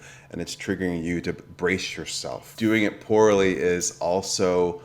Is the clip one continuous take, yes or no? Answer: no